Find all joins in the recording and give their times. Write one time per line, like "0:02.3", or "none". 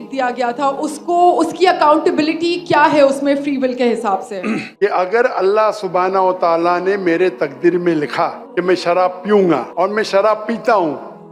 0:04.7
0:08.4
0:09.7